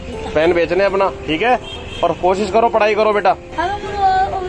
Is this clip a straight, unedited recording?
no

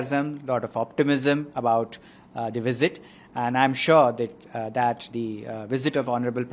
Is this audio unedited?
yes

